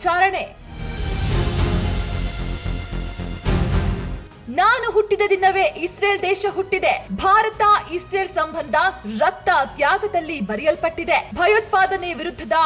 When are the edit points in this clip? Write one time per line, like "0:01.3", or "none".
none